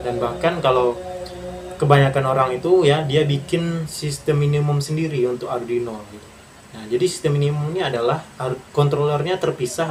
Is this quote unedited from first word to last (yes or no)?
yes